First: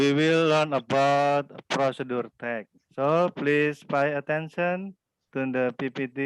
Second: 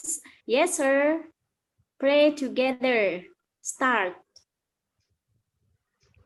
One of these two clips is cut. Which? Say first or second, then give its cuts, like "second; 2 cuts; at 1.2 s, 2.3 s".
first; 1 cut; at 2.8 s